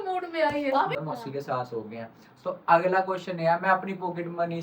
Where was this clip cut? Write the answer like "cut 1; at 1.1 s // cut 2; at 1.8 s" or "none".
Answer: cut 1; at 1.0 s